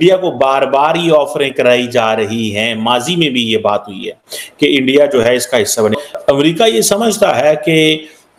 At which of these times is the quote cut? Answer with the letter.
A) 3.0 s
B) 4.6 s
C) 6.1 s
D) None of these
C